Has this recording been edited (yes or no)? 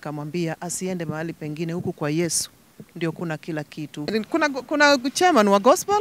yes